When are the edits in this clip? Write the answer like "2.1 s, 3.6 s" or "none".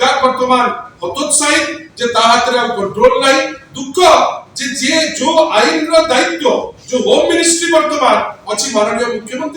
none